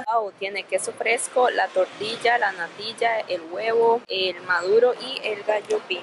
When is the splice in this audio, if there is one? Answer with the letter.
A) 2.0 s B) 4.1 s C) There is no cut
C